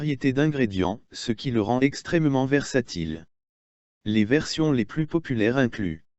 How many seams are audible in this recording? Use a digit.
1